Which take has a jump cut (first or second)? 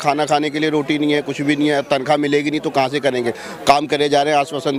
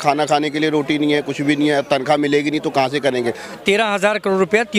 second